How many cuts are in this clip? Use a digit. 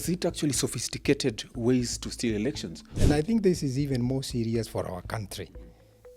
1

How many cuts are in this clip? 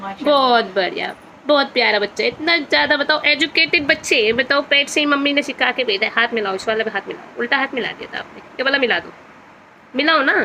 0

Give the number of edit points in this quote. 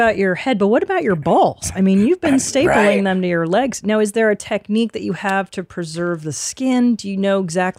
0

